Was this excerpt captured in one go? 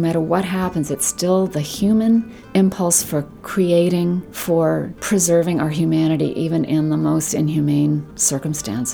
no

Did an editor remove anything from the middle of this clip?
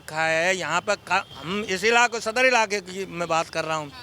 yes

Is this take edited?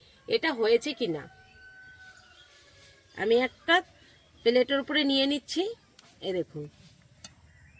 no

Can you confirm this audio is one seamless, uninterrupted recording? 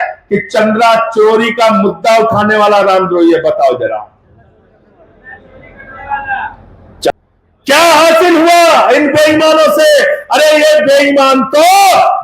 no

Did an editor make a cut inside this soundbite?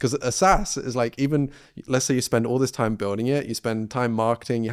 no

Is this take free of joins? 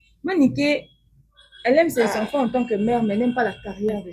yes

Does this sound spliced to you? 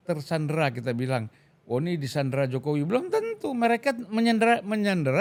no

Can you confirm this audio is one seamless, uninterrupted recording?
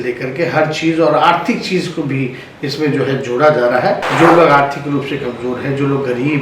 no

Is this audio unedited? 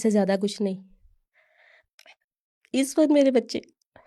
yes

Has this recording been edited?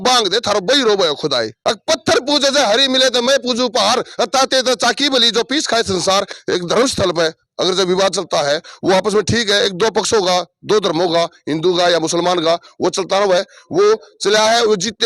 yes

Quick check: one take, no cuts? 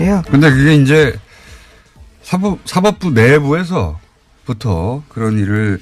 no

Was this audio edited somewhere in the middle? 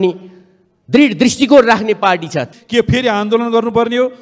yes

